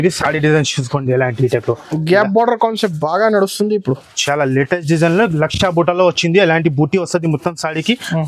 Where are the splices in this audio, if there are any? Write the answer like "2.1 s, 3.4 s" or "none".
none